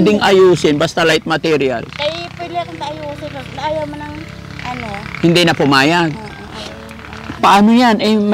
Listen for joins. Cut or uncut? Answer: cut